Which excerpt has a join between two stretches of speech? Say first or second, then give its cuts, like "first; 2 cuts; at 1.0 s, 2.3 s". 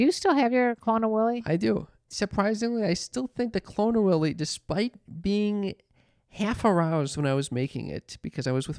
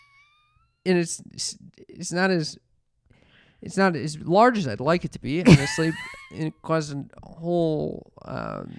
first; 1 cut; at 2.1 s